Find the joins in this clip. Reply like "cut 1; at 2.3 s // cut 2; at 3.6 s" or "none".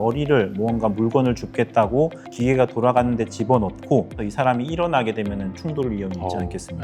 cut 1; at 4.2 s